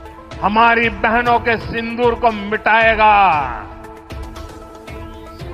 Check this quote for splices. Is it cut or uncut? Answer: uncut